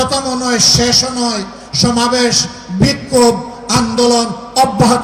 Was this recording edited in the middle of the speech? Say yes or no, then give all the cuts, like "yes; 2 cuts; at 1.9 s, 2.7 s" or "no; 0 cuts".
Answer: no; 0 cuts